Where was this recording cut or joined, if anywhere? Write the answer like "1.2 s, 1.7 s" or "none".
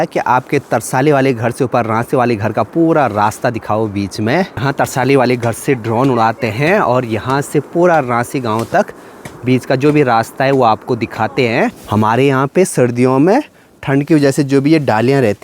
4.6 s, 11.8 s